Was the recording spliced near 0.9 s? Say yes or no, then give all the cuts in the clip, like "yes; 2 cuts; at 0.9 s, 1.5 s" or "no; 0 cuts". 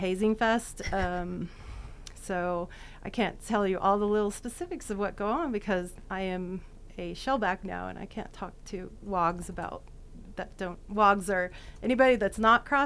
no; 0 cuts